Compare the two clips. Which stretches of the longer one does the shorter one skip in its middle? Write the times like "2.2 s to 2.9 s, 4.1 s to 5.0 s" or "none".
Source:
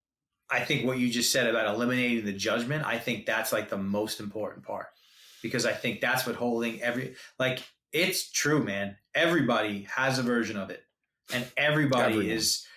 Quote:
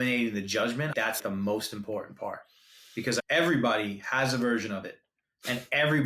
3.1 s to 3.6 s, 5.7 s to 9.1 s